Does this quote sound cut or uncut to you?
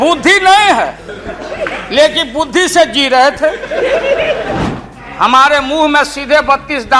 cut